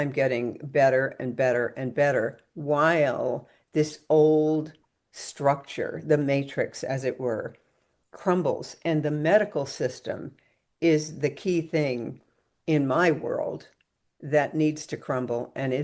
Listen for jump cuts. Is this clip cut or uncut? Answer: uncut